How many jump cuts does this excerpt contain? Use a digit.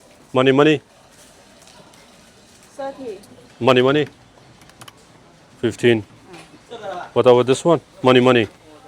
2